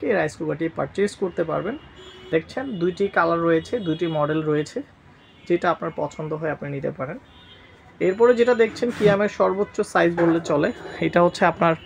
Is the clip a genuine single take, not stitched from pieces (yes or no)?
yes